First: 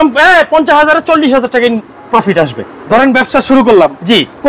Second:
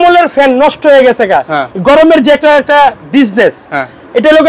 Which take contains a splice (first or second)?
first